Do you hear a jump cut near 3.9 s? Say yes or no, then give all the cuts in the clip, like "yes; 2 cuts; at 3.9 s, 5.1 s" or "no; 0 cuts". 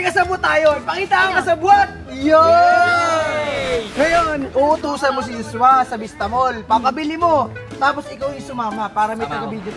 yes; 1 cut; at 3.9 s